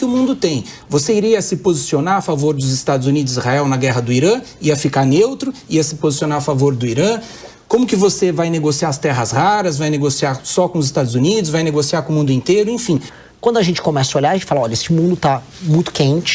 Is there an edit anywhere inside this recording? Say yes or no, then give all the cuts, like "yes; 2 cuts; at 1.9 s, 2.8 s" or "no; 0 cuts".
yes; 1 cut; at 13.2 s